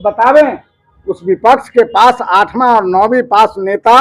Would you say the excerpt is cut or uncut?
uncut